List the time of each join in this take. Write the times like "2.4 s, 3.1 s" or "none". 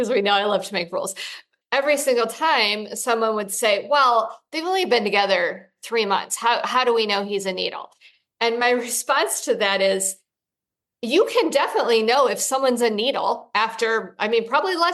1.2 s